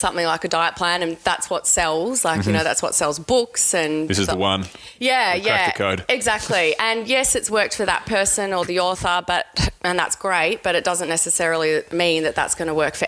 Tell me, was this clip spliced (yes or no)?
no